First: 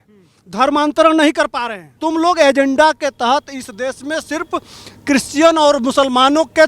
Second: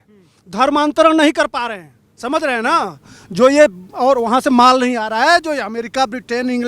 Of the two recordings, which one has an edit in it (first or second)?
first